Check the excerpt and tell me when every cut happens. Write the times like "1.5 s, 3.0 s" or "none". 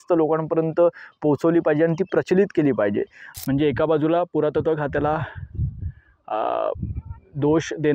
3.2 s